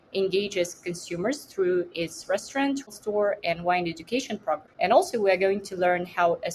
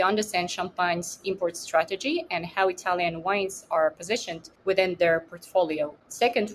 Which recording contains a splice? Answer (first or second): first